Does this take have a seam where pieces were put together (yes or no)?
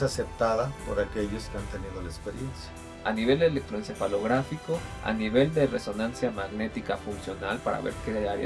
yes